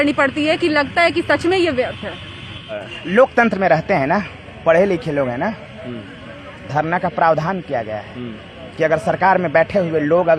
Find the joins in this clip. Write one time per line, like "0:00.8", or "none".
0:02.8